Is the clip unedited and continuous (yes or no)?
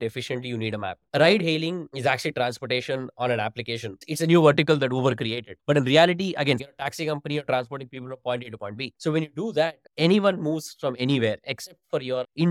no